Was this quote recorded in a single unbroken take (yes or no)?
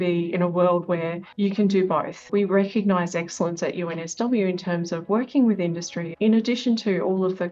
no